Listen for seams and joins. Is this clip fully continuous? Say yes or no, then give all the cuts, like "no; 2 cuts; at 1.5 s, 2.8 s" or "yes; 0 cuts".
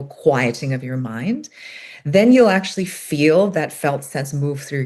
yes; 0 cuts